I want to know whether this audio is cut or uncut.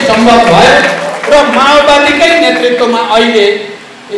uncut